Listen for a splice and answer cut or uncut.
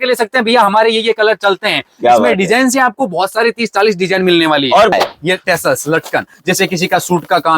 cut